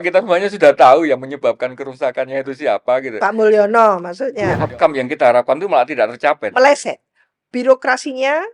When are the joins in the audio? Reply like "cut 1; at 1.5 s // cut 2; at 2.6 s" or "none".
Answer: cut 1; at 4.3 s